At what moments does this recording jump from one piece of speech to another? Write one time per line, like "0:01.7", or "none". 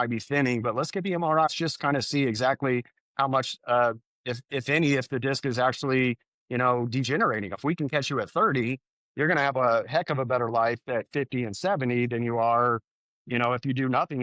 0:01.5
0:07.6